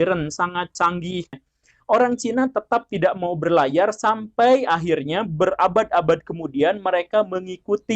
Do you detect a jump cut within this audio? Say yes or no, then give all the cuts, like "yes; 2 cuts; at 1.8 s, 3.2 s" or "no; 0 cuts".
yes; 1 cut; at 1.3 s